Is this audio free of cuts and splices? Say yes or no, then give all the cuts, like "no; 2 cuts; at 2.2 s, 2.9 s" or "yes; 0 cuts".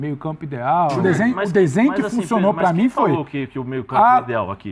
no; 1 cut; at 1.0 s